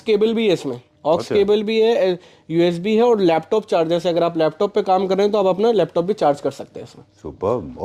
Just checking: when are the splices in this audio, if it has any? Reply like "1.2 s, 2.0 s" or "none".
none